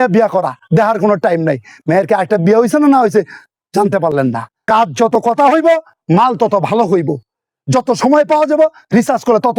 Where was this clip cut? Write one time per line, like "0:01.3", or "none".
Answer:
0:04.5